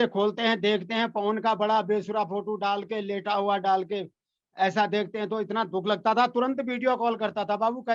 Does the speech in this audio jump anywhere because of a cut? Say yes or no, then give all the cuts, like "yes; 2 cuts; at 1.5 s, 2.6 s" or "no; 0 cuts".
no; 0 cuts